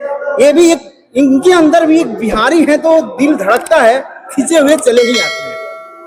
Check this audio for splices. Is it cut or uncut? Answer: uncut